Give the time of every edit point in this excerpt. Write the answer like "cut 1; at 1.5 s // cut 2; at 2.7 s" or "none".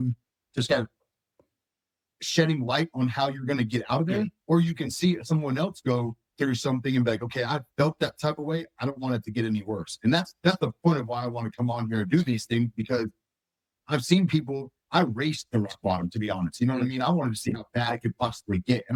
none